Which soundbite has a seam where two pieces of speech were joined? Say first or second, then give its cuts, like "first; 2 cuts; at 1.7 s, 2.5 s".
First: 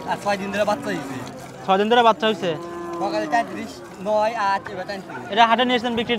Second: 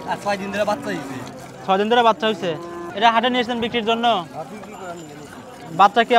second; 1 cut; at 2.8 s